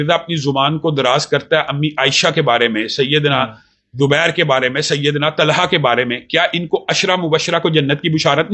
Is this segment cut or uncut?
uncut